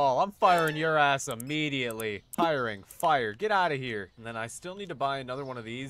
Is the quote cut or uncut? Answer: cut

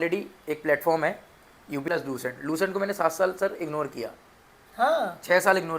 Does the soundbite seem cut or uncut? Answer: cut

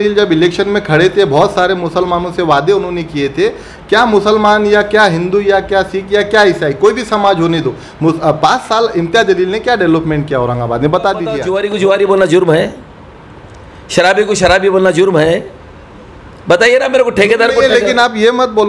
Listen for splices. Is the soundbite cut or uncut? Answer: cut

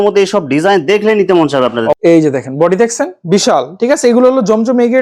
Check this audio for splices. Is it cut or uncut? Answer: cut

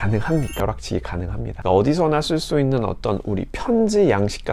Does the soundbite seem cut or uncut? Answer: cut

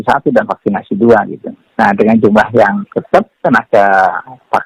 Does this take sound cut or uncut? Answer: uncut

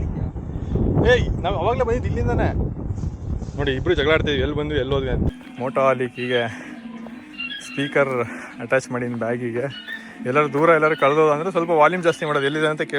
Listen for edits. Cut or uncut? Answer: cut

